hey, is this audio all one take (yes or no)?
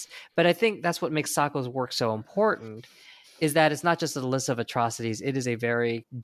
yes